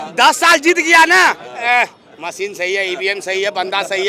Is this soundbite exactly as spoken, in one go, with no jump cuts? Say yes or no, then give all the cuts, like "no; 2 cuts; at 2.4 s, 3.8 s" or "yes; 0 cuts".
yes; 0 cuts